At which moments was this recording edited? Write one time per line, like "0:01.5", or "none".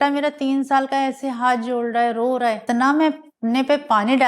0:02.6